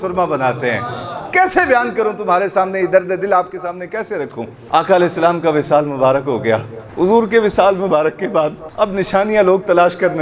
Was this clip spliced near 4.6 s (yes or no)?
yes